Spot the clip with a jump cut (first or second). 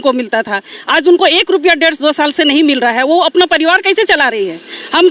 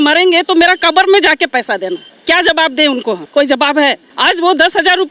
second